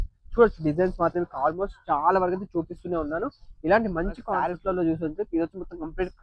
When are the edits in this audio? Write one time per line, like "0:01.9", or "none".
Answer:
0:04.3